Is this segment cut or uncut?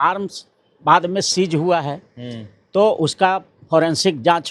uncut